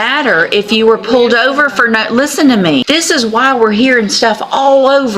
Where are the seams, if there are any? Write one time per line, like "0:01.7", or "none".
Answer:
0:02.8